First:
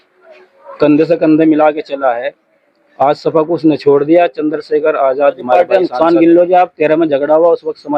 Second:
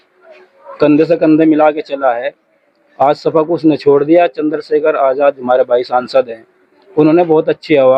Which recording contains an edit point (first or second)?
first